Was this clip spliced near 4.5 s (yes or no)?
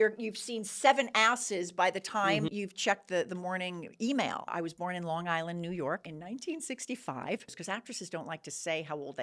yes